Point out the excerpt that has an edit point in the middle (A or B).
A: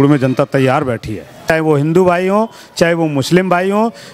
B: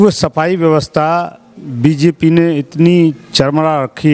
A